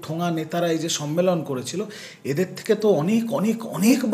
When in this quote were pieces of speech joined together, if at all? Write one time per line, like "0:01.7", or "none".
none